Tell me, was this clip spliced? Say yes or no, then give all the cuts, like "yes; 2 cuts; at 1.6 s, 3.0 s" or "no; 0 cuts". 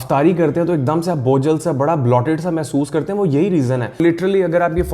yes; 1 cut; at 4.0 s